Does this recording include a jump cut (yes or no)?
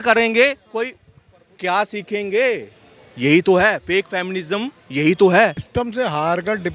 yes